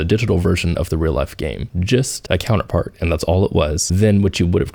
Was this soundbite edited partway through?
no; 0 cuts

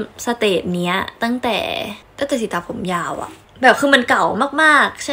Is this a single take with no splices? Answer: yes; 0 cuts

